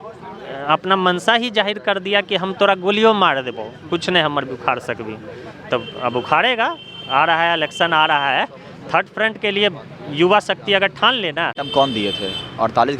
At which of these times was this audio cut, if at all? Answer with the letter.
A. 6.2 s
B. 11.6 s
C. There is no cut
B